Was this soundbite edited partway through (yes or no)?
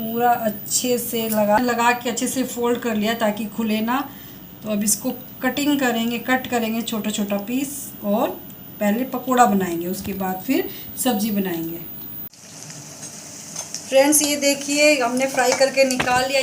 yes